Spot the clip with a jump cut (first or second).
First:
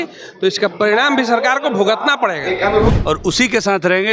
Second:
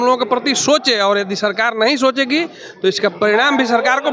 first